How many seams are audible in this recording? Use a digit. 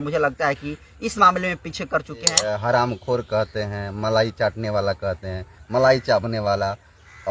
1